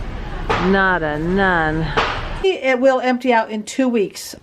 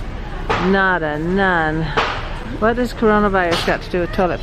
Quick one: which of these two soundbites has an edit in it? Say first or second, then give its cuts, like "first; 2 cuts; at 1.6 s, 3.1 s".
first; 1 cut; at 2.4 s